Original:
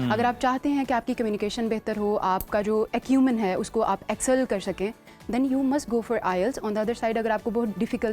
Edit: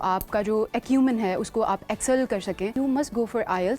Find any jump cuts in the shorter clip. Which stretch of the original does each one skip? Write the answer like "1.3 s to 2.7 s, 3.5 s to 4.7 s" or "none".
4.9 s to 5.5 s